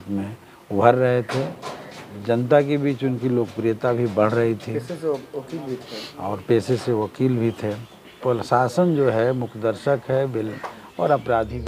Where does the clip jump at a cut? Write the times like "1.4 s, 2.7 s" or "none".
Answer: 8.1 s

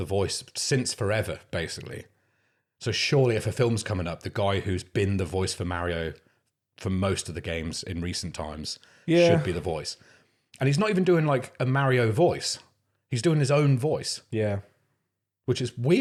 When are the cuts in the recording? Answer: none

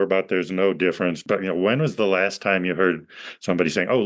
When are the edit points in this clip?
1.2 s

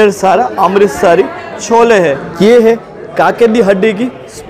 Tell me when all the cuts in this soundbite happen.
2.3 s

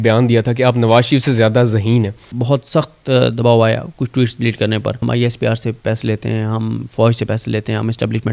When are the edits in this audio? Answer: 2.3 s, 5.0 s

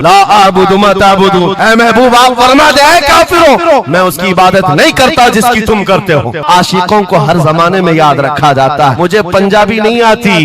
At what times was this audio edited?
6.4 s, 9.0 s

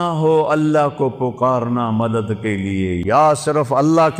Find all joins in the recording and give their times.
3.0 s

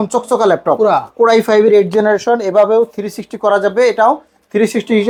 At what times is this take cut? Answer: none

